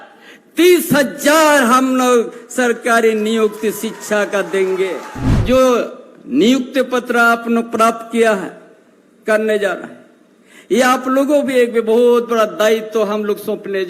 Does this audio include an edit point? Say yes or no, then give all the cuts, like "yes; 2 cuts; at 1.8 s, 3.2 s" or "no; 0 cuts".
yes; 1 cut; at 5.4 s